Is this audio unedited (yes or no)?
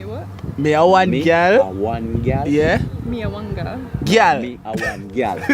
yes